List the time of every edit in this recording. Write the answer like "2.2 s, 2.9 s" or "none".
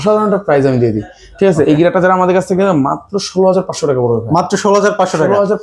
none